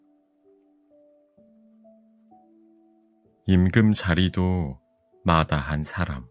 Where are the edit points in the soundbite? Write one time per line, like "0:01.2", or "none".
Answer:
0:03.3